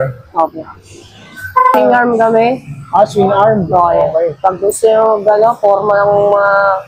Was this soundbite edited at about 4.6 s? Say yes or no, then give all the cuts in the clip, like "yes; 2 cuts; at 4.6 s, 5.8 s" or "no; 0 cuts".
no; 1 cut; at 1.7 s